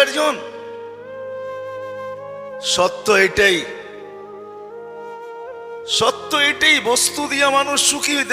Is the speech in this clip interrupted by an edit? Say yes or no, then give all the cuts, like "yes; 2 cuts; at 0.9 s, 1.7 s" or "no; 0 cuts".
no; 0 cuts